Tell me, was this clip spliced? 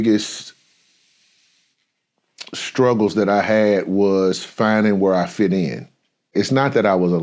yes; 1 cut; at 6.3 s

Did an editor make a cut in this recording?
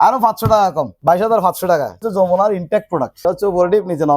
yes; 3 cuts; at 0.9 s, 2.1 s, 3.2 s

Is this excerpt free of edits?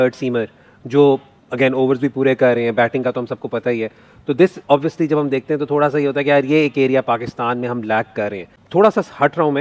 yes; 0 cuts

